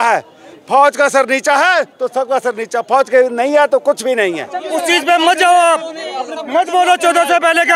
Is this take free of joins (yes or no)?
no